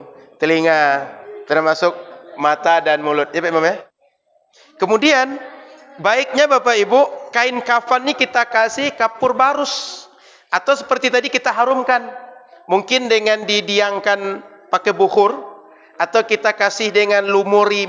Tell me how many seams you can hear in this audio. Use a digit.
1